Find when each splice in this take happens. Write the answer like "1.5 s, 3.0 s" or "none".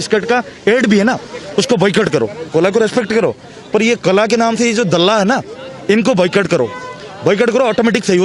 2.4 s